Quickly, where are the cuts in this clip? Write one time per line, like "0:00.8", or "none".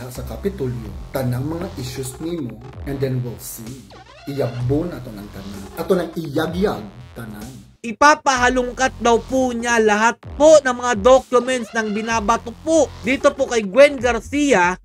0:07.8